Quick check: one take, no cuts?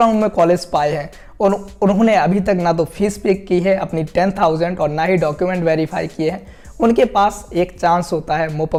yes; 0 cuts

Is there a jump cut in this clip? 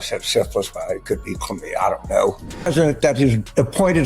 yes; 1 cut; at 2.5 s

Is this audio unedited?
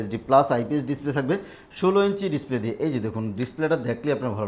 yes; 0 cuts

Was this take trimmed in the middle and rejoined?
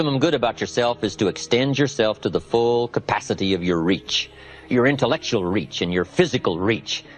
no; 0 cuts

